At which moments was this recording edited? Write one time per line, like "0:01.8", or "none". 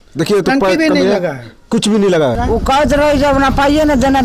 0:02.4